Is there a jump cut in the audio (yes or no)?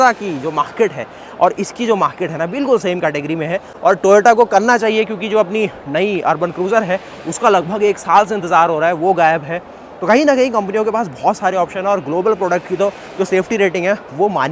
no